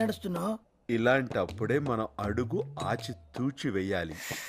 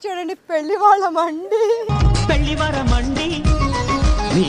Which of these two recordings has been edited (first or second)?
second